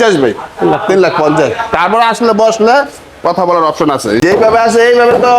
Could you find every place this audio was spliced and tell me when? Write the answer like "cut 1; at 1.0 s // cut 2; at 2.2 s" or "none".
cut 1; at 4.2 s